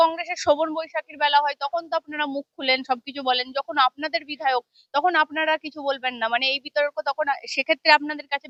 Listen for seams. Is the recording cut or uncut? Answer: uncut